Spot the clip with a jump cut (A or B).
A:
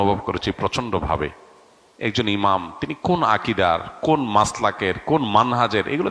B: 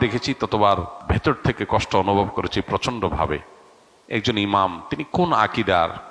B